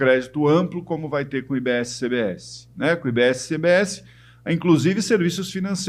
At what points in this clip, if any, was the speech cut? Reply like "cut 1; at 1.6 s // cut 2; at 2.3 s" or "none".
none